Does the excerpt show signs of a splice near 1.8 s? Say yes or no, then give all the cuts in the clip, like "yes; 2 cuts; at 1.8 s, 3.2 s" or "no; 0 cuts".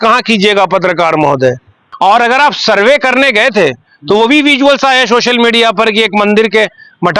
yes; 1 cut; at 1.8 s